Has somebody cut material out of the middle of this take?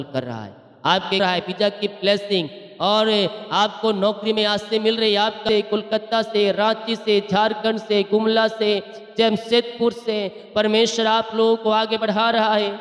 yes; 2 cuts; at 1.2 s, 5.4 s

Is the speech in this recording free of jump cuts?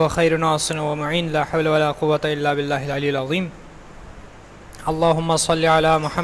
no; 1 cut; at 5.1 s

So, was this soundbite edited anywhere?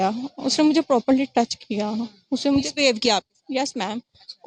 no; 0 cuts

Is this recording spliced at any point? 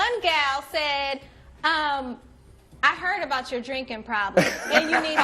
no; 0 cuts

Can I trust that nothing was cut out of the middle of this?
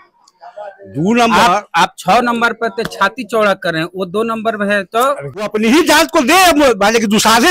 no; 1 cut; at 5.5 s

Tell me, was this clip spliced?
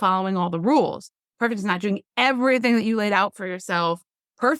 no; 0 cuts

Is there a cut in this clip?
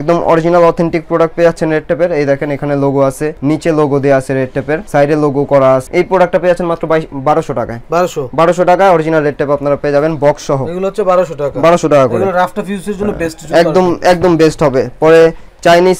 no; 0 cuts

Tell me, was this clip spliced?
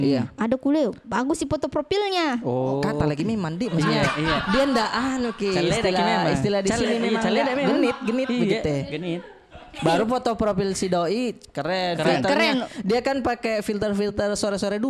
no; 0 cuts

